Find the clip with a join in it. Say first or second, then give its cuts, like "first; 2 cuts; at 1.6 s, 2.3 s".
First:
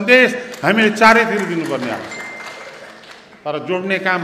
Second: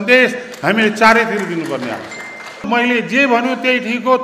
second; 1 cut; at 2.6 s